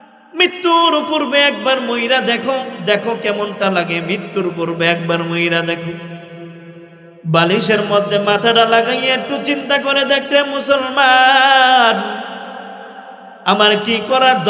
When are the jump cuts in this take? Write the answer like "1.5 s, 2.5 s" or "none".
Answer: none